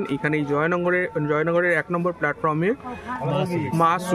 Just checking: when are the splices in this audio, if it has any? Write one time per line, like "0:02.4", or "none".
none